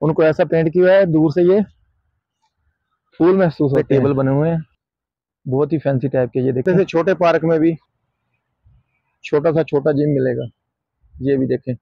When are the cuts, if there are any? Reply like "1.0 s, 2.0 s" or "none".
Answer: 3.8 s, 6.6 s